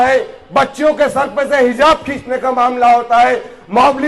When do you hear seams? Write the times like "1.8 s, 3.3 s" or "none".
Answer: none